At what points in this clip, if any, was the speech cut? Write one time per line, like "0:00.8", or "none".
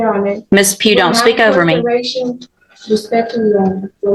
none